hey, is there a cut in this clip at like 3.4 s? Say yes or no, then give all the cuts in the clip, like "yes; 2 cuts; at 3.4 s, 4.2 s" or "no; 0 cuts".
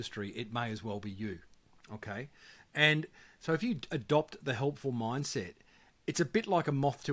no; 0 cuts